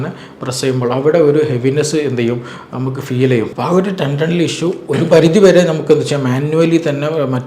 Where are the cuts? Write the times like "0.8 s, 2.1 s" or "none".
3.5 s